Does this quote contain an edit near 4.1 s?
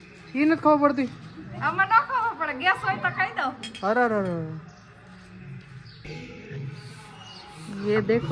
no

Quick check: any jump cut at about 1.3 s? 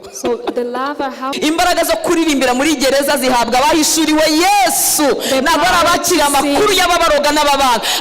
yes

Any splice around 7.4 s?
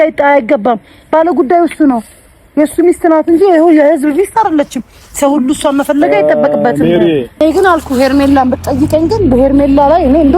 yes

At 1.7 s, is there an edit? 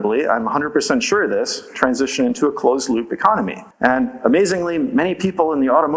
no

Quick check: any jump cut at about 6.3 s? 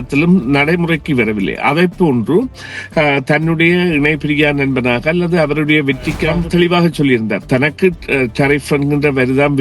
yes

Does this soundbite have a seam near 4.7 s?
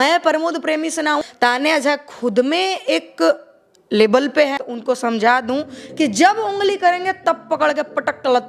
yes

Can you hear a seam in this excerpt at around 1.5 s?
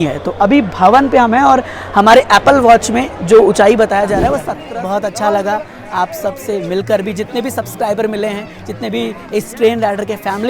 no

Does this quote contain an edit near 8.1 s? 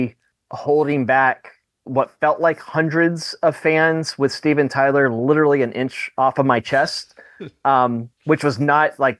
yes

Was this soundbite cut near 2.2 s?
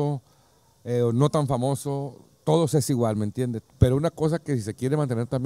no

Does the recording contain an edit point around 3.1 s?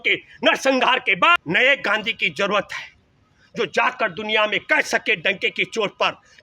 no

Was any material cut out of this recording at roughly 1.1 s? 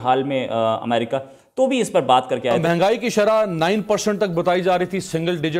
no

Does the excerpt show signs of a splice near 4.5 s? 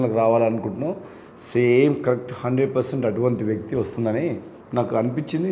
yes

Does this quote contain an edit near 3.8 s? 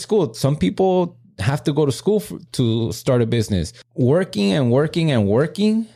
yes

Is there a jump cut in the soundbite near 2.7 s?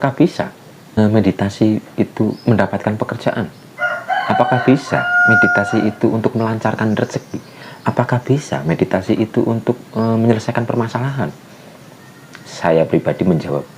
no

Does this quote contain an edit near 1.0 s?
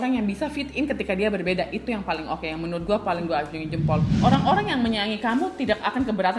no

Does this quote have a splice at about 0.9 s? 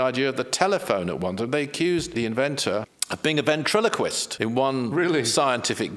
no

